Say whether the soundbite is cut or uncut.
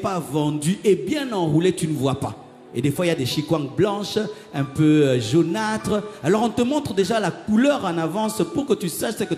uncut